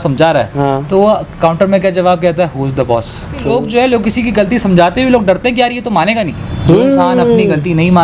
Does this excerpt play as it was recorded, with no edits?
no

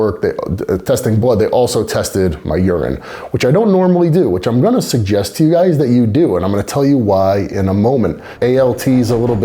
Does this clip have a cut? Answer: yes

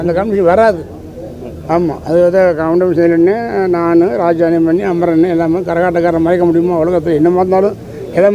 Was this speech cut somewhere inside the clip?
no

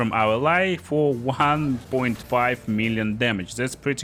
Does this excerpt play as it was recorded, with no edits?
yes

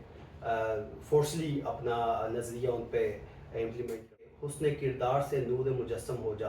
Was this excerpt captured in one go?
no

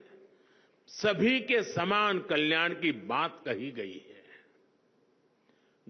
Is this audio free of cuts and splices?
yes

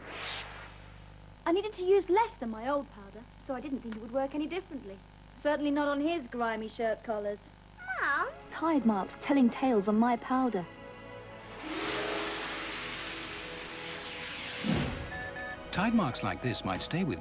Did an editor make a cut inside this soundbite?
yes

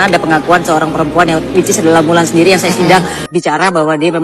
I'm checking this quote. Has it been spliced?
yes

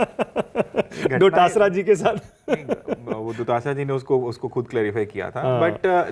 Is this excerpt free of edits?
yes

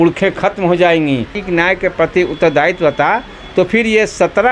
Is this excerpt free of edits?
no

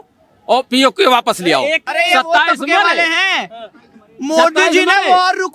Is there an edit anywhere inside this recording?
yes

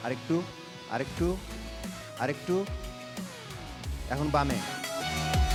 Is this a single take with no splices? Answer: yes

